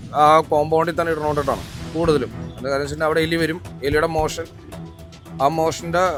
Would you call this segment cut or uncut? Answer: uncut